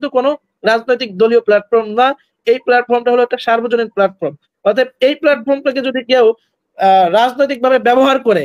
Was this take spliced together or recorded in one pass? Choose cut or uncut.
uncut